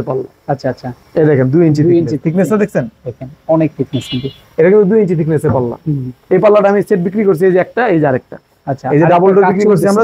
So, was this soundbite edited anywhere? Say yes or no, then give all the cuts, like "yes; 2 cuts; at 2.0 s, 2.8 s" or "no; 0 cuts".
no; 0 cuts